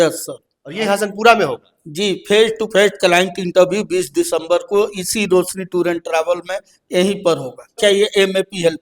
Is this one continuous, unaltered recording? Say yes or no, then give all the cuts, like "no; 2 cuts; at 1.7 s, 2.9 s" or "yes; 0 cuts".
no; 1 cut; at 7.8 s